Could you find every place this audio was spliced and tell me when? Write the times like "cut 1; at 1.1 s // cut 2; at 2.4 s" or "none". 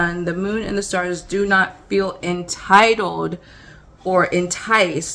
none